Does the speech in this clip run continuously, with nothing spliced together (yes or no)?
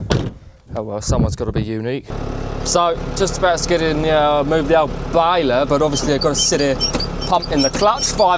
no